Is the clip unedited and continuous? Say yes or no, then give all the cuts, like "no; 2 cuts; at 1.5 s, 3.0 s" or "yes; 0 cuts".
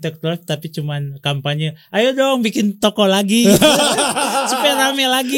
yes; 0 cuts